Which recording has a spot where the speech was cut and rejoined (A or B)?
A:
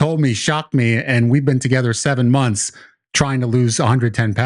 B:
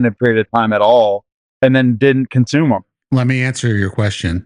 B